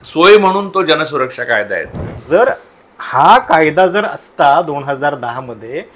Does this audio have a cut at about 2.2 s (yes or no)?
yes